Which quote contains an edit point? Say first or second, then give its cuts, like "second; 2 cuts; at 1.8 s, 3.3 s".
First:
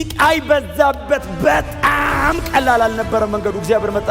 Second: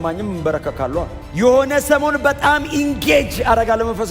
second; 1 cut; at 1.2 s